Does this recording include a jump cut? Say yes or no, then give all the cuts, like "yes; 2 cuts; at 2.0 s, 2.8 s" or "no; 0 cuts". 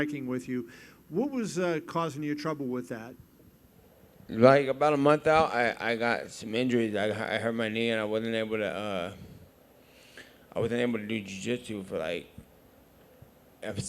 yes; 1 cut; at 7.2 s